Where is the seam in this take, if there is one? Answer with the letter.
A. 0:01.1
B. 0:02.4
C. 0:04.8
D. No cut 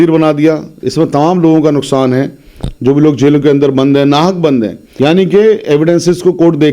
C